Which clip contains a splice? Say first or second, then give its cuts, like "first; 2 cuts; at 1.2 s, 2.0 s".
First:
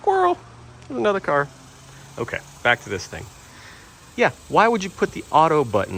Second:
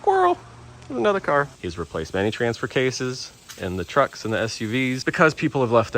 second; 2 cuts; at 1.6 s, 5.0 s